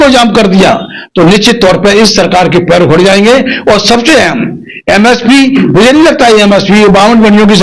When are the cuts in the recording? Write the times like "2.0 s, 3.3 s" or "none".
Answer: none